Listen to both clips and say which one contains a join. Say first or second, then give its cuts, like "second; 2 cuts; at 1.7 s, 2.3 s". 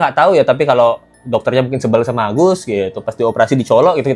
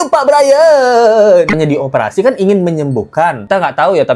second; 1 cut; at 1.5 s